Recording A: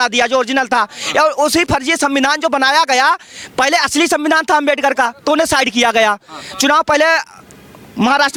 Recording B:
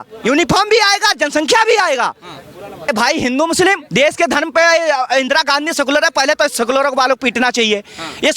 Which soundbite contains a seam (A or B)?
B